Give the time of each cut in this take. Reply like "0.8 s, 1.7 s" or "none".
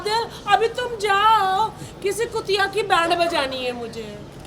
none

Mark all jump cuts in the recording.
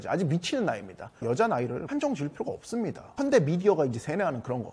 1.2 s, 3.0 s

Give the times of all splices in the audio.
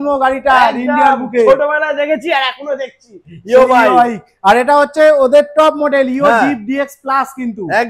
none

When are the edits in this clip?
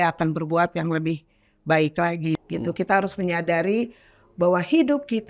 2.3 s

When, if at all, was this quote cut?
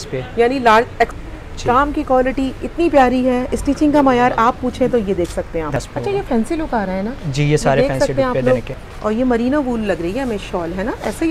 1.1 s, 5.8 s, 8.8 s

